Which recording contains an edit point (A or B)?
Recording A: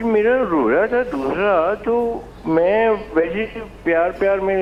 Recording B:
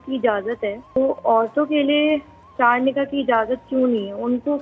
B